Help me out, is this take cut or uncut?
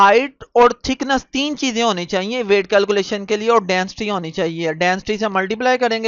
uncut